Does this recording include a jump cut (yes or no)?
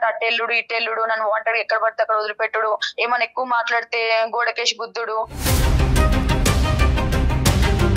no